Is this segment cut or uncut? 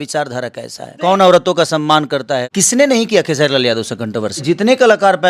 cut